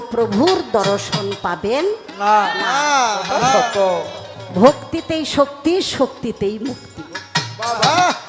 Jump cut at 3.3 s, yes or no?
no